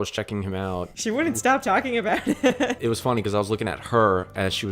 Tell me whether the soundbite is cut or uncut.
cut